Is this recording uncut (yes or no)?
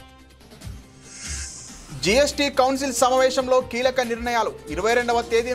no